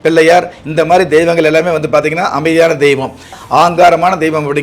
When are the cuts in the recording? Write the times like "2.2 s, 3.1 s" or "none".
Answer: 3.4 s